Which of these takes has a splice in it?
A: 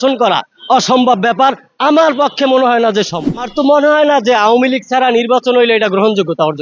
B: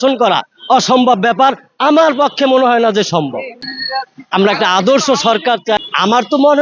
A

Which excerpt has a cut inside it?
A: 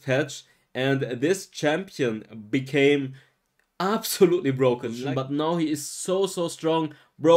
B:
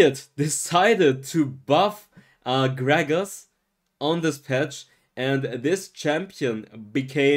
A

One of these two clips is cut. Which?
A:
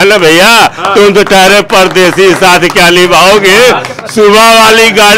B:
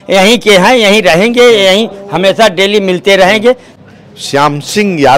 B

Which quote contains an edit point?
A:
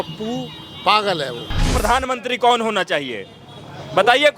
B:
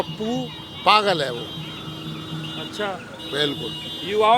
A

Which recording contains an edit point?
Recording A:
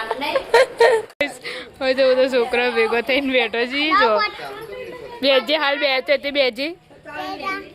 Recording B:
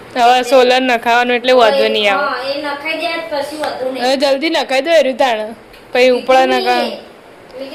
A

